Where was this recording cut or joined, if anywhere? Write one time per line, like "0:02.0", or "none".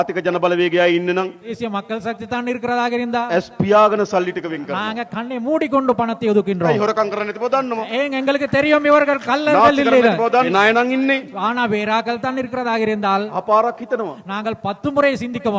0:01.5
0:10.5
0:13.4